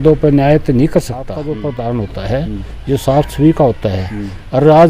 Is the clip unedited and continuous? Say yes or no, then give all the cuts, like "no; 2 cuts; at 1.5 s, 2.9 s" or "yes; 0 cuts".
no; 1 cut; at 1.4 s